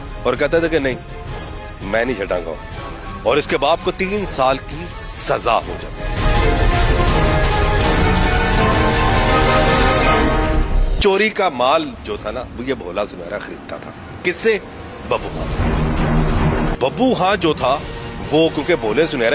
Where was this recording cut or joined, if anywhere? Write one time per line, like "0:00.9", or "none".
0:11.0
0:16.7